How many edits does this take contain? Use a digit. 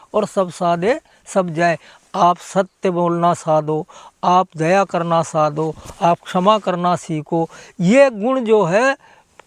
0